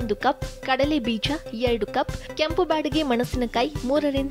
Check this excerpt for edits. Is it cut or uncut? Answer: uncut